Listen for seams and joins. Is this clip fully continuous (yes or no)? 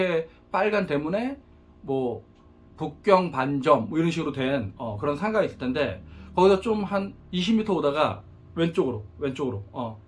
yes